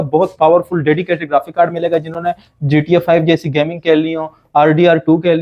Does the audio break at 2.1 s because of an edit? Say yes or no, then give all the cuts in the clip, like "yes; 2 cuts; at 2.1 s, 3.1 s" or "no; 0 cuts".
no; 0 cuts